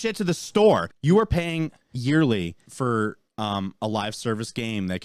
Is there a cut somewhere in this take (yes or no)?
yes